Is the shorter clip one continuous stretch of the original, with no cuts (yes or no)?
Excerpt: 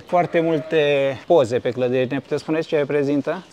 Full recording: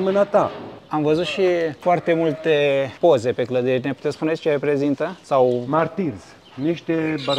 yes